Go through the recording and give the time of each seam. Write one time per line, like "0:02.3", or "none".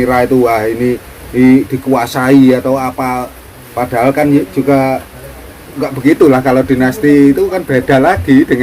none